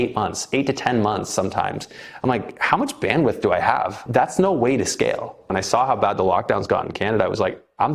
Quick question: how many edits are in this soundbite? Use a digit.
2